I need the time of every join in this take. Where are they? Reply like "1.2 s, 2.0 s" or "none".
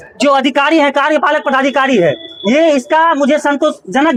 none